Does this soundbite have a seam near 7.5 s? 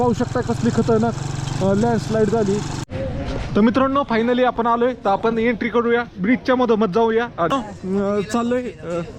yes; 2 cuts; at 2.7 s, 7.5 s

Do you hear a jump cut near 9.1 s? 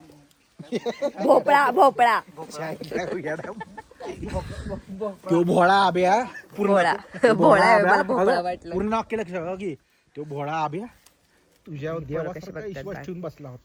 no; 0 cuts

